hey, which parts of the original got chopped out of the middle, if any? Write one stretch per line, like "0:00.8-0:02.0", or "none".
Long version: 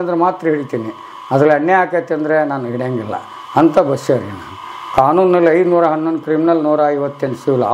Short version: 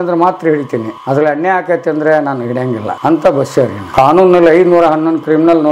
0:00.9-0:01.2
0:03.1-0:03.4
0:04.3-0:04.8